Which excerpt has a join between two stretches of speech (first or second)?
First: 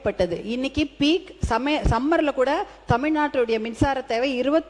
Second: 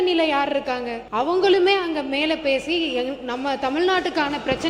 second